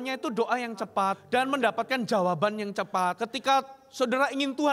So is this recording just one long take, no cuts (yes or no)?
no